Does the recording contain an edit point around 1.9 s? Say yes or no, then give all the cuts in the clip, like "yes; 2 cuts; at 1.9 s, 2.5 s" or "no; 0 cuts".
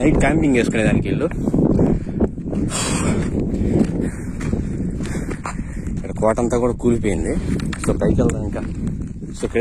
no; 0 cuts